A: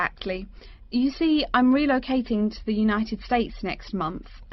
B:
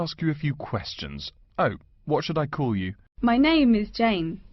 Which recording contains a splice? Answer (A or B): B